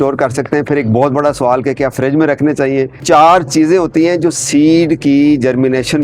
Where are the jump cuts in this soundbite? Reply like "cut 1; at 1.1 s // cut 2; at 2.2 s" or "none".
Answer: cut 1; at 3.0 s